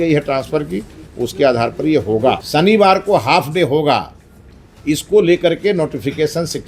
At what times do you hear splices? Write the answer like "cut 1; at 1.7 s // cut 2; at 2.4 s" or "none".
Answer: cut 1; at 2.4 s